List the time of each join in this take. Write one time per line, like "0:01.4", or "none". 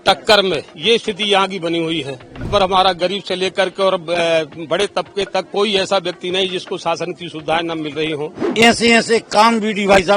0:02.5
0:08.4